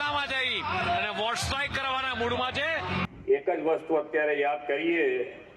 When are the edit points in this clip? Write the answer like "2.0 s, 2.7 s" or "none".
3.1 s